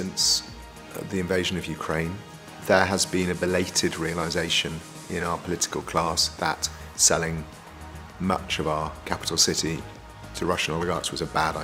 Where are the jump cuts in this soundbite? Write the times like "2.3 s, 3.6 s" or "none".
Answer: none